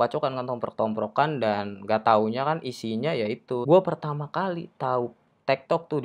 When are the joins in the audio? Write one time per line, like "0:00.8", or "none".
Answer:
0:03.6

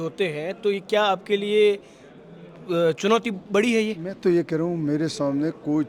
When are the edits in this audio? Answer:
none

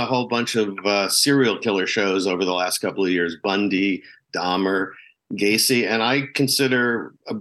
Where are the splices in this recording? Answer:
none

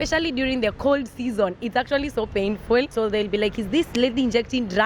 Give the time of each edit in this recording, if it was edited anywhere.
0:02.9

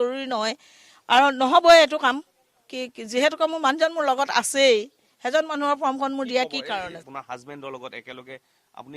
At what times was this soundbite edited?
0:07.1

